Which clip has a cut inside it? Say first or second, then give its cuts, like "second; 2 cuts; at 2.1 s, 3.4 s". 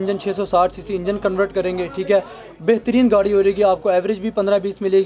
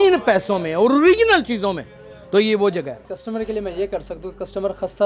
second; 1 cut; at 3.1 s